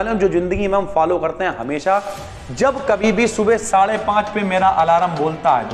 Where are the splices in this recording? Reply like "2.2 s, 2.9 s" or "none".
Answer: none